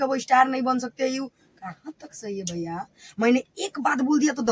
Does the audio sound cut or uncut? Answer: uncut